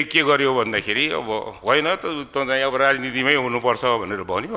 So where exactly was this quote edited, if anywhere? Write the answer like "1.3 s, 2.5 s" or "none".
none